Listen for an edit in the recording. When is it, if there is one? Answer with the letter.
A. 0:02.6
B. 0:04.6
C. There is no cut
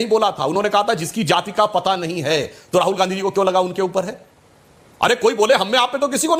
C